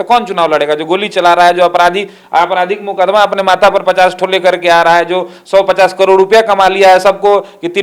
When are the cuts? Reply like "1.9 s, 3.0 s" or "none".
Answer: none